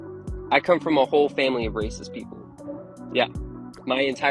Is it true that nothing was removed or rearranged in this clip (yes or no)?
yes